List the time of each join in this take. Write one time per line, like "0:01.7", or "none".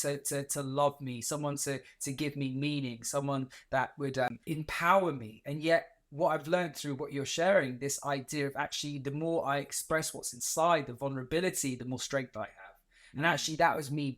0:04.3